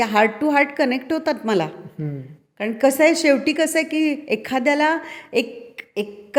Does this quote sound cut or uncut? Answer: uncut